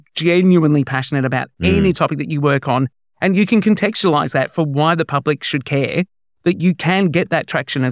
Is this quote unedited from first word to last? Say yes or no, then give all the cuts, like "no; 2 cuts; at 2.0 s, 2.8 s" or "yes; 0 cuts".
yes; 0 cuts